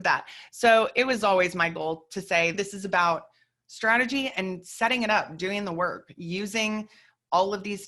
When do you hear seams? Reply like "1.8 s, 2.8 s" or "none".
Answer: 2.6 s